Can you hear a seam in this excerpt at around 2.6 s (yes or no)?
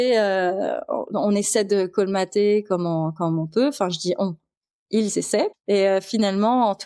no